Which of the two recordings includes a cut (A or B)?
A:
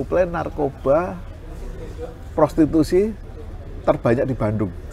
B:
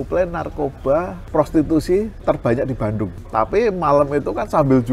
B